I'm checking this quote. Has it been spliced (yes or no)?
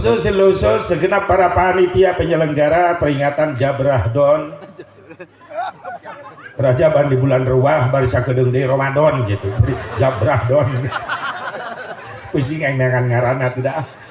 no